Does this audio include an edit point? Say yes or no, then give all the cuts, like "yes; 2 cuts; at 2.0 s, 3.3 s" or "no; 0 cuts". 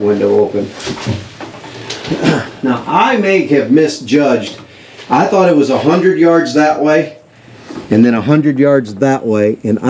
no; 0 cuts